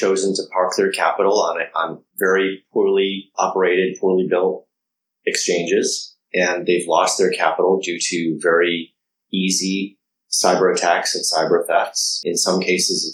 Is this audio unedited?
no; 2 cuts; at 2.0 s, 3.3 s

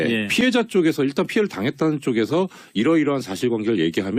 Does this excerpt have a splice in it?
yes; 1 cut; at 2.8 s

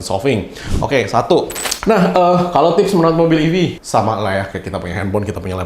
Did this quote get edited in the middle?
yes; 1 cut; at 1.6 s

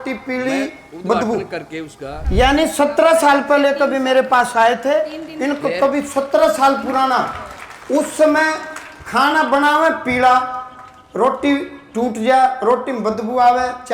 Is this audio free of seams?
no; 1 cut; at 2.1 s

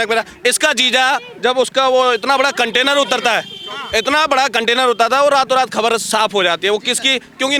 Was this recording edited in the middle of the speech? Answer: no; 0 cuts

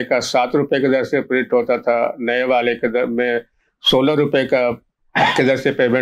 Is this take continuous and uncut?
yes; 0 cuts

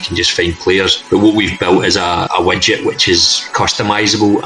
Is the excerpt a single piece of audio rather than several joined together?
no; 3 cuts; at 1.0 s, 2.3 s, 3.5 s

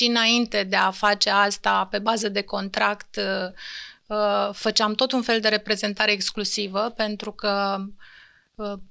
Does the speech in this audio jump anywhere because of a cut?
no; 0 cuts

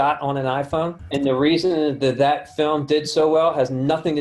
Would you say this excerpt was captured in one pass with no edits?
no; 1 cut; at 1.0 s

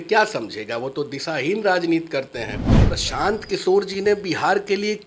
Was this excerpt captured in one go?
no; 1 cut; at 2.9 s

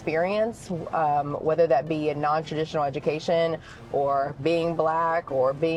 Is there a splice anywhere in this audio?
no; 0 cuts

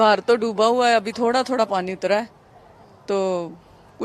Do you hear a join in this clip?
no; 0 cuts

